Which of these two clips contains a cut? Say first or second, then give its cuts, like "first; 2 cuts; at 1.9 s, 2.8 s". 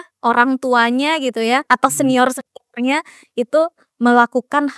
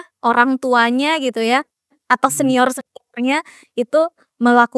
first; 1 cut; at 1.6 s